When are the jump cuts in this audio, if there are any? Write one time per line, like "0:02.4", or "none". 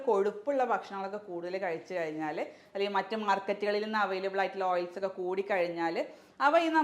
0:02.6

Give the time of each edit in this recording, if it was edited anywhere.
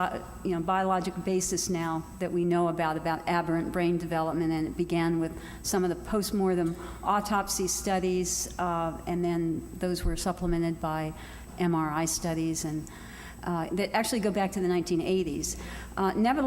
0:10.5

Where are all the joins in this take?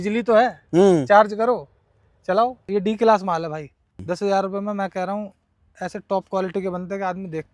0:02.6
0:04.0

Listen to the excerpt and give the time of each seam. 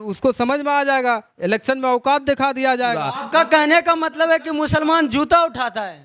0:03.2

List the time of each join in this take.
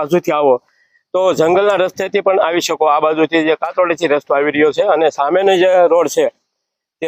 none

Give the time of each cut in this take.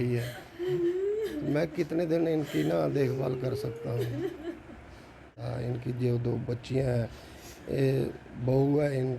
0:05.4

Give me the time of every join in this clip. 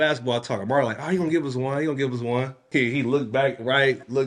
0:02.7

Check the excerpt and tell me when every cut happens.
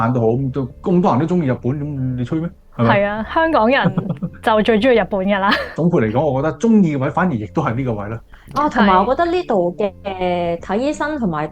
none

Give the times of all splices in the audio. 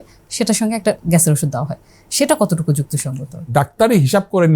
0:03.5

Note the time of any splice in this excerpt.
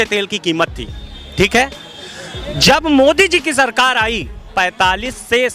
0:04.4

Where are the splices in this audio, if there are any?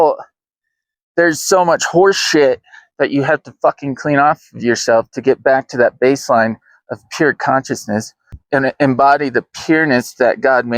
0:08.3

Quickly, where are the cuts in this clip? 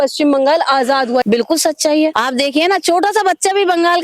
0:01.2
0:02.2

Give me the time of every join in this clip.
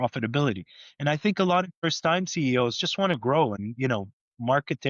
0:01.8
0:03.6

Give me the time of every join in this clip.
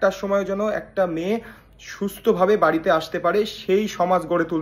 none

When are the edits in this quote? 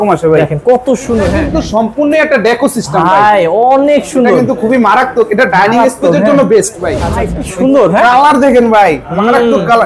0:01.4
0:07.1

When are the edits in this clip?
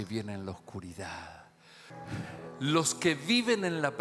0:01.9

